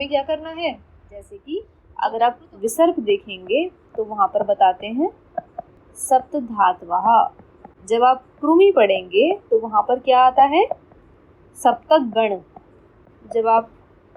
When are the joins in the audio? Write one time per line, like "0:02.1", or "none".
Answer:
0:00.9